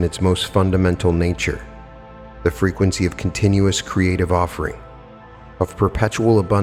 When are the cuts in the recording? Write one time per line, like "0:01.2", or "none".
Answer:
none

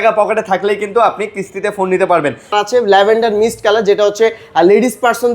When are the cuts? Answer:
0:02.5

